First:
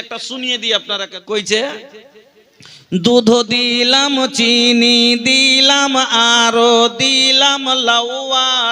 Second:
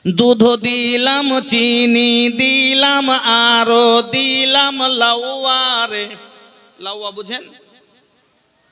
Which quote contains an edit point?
first; 1 cut; at 1.1 s

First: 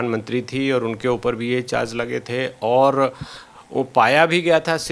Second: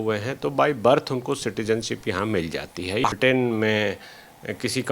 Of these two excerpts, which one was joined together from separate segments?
second; 1 cut; at 3.1 s

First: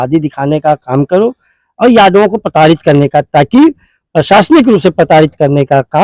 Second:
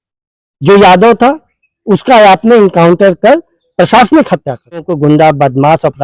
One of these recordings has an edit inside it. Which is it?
second; 1 cut; at 4.9 s

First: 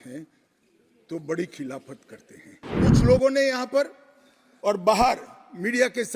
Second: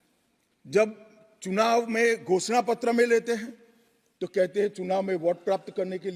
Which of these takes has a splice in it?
first; 1 cut; at 2.9 s

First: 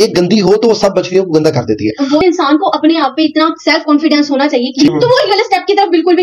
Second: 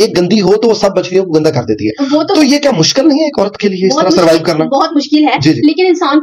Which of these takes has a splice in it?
first; 2 cuts; at 2.2 s, 4.9 s

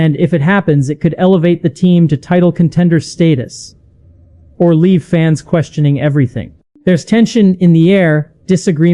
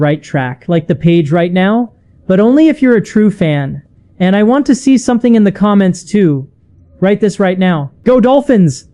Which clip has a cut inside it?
second; 1 cut; at 7.9 s

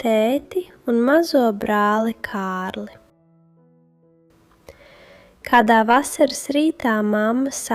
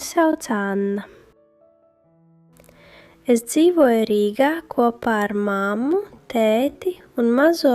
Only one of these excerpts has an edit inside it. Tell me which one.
first; 2 cuts; at 3.0 s, 4.2 s

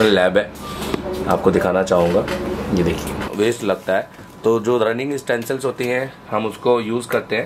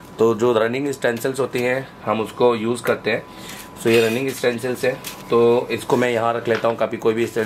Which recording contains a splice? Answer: first; 1 cut; at 3.2 s

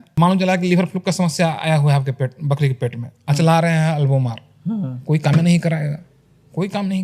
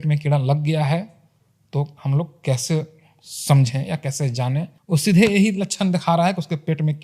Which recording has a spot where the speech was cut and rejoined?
second; 1 cut; at 4.8 s

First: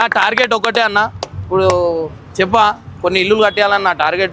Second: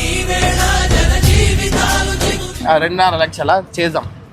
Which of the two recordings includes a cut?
second; 1 cut; at 2.5 s

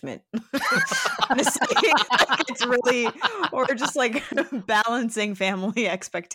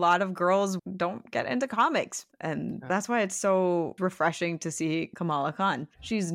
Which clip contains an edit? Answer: second; 4 cuts; at 0.8 s, 2.3 s, 3.9 s, 5.4 s

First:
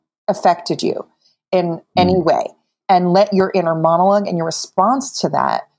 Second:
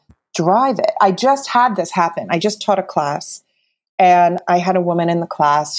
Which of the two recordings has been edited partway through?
first; 1 cut; at 2.8 s

